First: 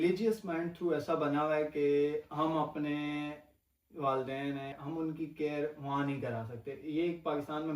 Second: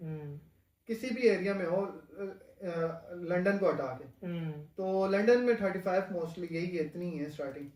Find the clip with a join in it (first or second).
first